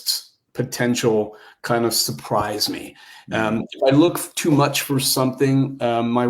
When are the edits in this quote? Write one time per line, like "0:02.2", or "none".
none